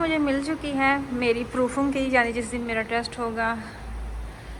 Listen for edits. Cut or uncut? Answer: uncut